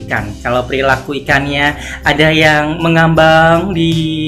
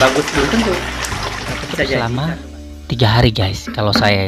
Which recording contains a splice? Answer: second; 1 cut; at 2.0 s

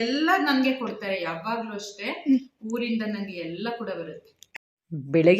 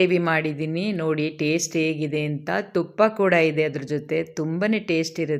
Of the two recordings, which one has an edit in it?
first; 1 cut; at 4.3 s

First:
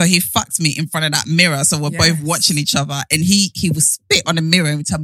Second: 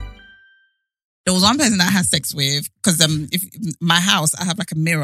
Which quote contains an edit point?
second; 1 cut; at 1.1 s

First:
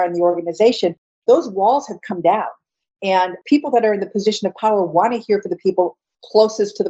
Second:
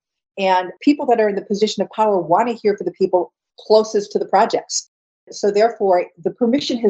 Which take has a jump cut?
first; 1 cut; at 1.2 s

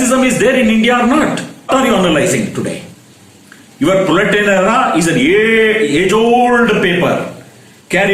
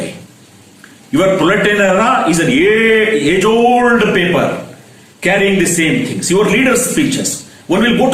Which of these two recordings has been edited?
first; 1 cut; at 1.7 s

